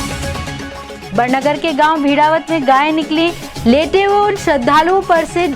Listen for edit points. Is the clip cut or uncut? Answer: cut